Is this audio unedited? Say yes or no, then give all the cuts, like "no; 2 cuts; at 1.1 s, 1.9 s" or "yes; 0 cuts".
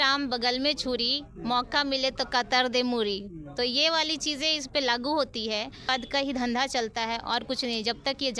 no; 1 cut; at 5.9 s